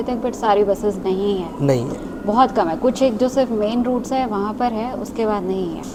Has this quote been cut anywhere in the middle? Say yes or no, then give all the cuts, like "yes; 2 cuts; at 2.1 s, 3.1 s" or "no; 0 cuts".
no; 0 cuts